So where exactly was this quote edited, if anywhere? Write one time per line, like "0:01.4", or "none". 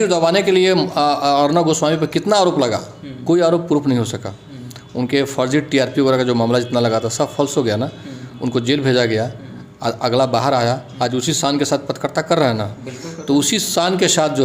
none

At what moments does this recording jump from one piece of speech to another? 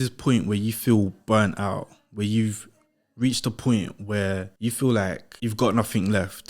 0:04.5
0:05.3

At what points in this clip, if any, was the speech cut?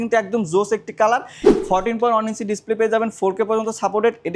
0:01.4

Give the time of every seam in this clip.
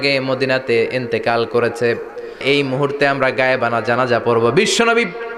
0:02.4

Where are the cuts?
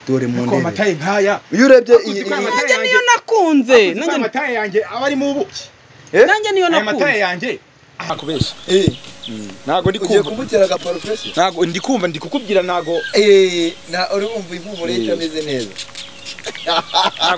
0:08.1

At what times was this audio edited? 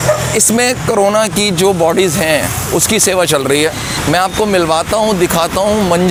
none

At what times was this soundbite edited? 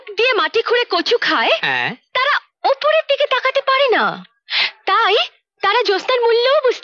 none

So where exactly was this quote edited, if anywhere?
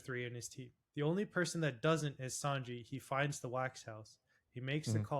0:01.0

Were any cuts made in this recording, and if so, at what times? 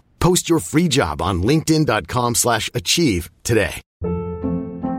0:03.9

